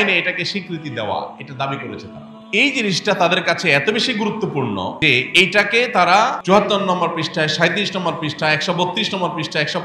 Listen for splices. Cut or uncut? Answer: cut